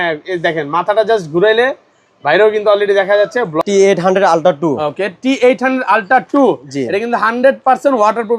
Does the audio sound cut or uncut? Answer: cut